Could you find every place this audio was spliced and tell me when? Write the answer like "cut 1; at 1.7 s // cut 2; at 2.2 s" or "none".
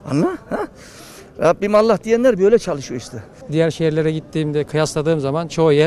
cut 1; at 3.3 s